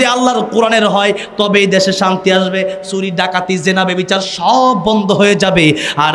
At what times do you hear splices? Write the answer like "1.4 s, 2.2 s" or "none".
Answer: none